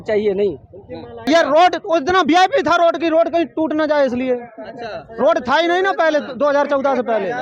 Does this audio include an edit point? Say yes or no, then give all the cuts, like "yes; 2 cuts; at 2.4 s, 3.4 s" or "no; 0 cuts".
yes; 1 cut; at 1.3 s